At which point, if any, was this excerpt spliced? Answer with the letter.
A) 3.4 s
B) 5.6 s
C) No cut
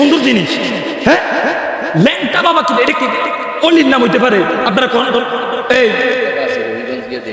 B